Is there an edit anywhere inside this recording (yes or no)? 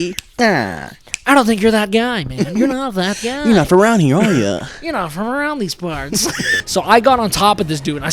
yes